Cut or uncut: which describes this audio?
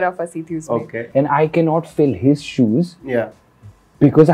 cut